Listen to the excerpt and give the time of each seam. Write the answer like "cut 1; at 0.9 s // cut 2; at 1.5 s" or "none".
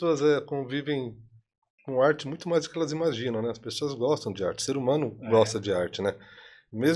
none